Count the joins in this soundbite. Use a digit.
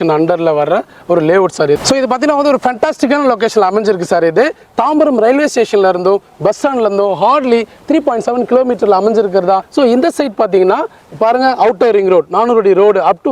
2